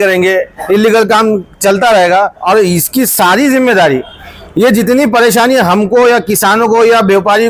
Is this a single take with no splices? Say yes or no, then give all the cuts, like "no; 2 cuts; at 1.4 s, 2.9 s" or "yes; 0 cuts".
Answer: no; 1 cut; at 2.4 s